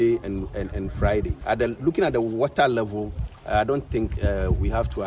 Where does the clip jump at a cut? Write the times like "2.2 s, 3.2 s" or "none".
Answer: 1.3 s